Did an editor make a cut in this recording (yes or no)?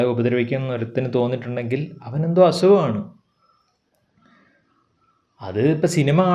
no